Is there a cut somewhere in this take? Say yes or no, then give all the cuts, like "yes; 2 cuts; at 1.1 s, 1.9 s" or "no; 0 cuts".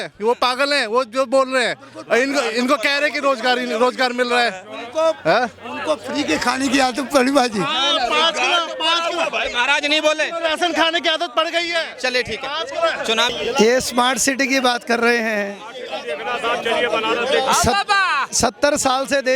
no; 0 cuts